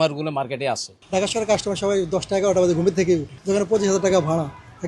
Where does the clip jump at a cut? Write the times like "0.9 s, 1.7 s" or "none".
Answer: 0.9 s, 3.3 s